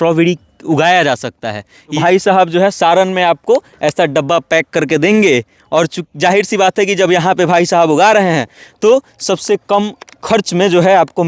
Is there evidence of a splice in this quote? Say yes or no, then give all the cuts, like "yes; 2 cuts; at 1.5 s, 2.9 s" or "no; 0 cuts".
yes; 1 cut; at 1.9 s